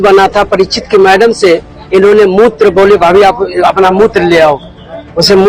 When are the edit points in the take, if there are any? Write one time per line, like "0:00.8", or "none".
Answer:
none